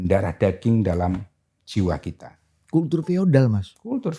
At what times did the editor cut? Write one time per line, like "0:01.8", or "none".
none